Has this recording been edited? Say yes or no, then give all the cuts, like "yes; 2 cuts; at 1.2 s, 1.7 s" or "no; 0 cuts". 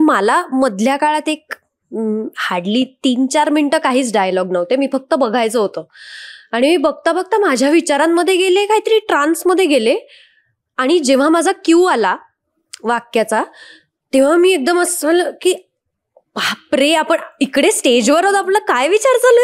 no; 0 cuts